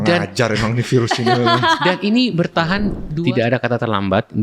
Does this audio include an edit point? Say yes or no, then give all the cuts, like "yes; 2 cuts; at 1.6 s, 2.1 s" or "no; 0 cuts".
yes; 1 cut; at 3.0 s